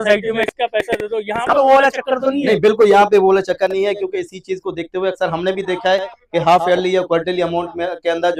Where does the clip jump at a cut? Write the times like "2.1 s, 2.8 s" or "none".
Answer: none